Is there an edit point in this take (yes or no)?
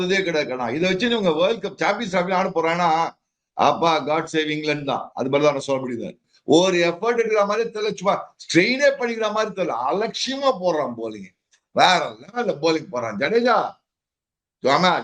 yes